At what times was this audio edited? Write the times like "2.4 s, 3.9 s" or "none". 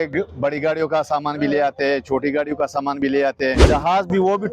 3.6 s